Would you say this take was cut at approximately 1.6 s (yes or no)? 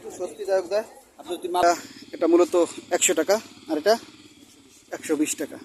yes